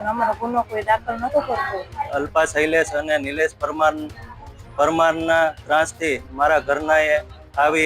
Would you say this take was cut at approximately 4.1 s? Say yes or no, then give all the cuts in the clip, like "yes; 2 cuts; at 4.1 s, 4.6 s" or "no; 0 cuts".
no; 1 cut; at 2.1 s